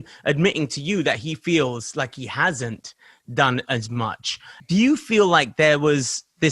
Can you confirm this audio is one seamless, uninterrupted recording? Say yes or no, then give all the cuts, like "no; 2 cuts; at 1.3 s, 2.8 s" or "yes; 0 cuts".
no; 1 cut; at 4.5 s